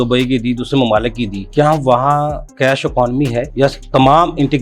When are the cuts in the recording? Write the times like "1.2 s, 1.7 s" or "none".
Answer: 1.4 s